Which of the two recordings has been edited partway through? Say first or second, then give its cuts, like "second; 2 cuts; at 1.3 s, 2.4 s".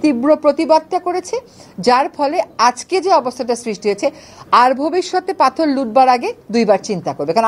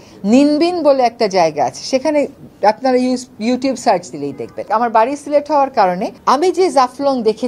second; 1 cut; at 4.7 s